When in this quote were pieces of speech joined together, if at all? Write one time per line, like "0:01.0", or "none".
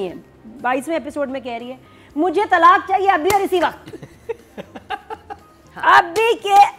none